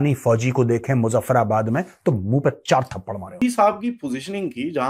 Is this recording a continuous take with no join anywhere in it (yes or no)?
no